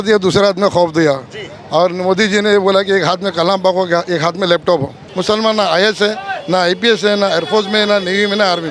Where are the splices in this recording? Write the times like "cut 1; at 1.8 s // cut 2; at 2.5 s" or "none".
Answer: cut 1; at 5.0 s